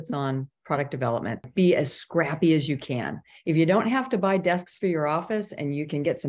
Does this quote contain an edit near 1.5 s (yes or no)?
yes